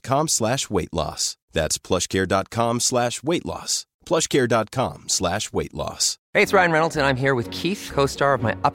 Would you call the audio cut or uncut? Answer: cut